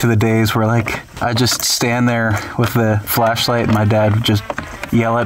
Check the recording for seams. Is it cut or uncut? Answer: cut